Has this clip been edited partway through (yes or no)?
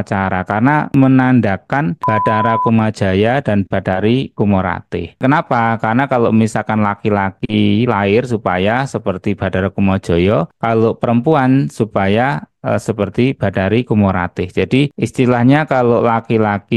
yes